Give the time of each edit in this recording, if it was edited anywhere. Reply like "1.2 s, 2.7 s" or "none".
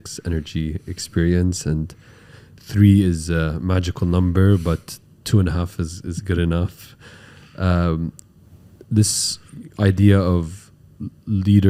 none